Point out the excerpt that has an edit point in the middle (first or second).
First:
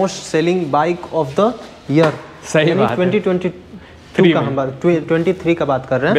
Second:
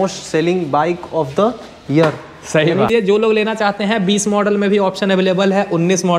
second